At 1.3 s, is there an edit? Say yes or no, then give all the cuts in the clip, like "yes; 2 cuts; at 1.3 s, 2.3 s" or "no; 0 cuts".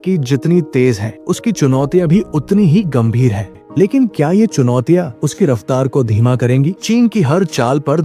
no; 2 cuts; at 3.5 s, 6.8 s